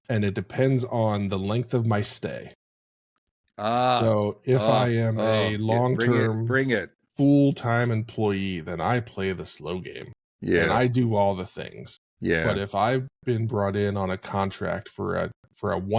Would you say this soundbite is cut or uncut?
uncut